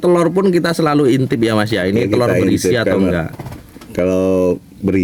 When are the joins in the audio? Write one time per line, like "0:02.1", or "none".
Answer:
none